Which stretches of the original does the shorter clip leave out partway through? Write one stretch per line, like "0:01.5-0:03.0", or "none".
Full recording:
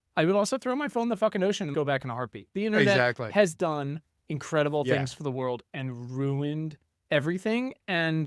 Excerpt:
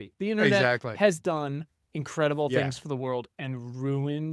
none